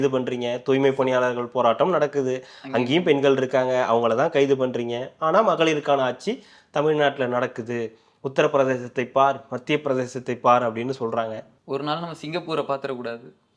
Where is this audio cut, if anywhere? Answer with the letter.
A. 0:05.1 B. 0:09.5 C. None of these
C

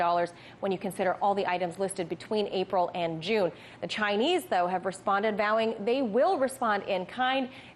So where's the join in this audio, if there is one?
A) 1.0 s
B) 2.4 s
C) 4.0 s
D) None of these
D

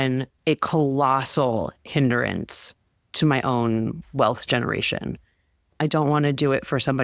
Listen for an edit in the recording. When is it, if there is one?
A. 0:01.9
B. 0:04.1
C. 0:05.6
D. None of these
C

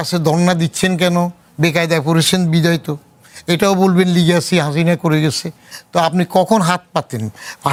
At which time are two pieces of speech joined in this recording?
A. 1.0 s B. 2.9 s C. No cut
C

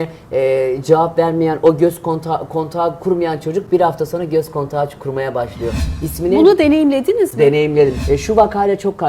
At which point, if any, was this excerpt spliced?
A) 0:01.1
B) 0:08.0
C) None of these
B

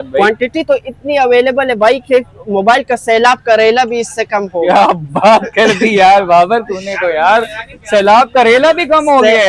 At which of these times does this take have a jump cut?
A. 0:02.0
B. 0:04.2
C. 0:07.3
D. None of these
D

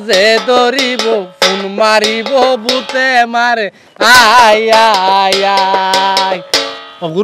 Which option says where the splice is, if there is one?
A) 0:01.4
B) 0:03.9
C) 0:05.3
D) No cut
D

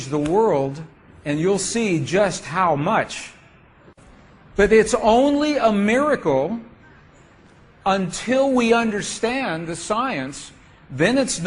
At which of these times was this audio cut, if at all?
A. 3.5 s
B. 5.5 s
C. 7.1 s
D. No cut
A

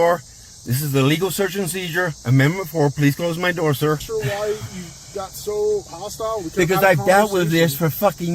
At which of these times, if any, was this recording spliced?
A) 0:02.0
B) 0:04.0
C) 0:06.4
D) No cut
B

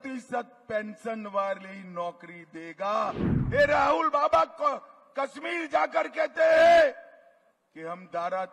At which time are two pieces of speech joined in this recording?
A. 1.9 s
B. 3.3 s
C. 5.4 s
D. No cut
B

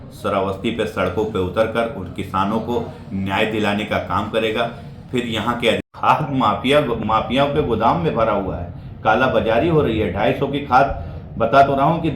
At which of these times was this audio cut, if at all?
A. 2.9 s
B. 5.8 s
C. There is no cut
B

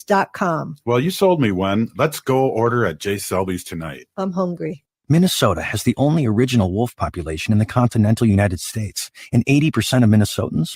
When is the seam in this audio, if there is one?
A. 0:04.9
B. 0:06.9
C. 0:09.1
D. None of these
A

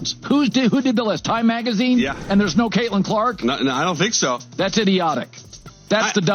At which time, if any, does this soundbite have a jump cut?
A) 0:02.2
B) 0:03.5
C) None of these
A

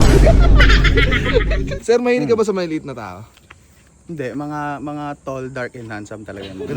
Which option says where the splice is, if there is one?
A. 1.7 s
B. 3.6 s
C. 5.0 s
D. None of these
A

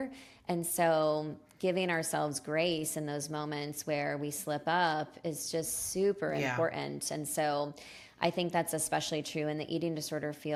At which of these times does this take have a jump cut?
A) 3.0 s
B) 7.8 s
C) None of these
C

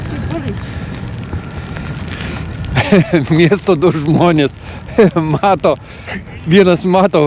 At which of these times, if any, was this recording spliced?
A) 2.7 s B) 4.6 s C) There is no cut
C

